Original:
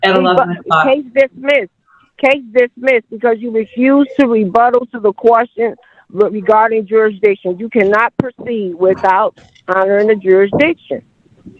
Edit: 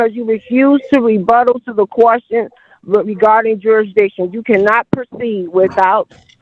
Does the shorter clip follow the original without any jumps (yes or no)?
yes